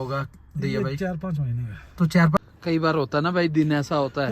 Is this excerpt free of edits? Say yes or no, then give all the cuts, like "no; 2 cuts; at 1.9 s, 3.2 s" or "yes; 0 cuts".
no; 1 cut; at 2.4 s